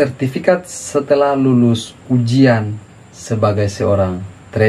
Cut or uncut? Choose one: uncut